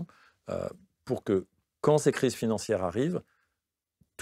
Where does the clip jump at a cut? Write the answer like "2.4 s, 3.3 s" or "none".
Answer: none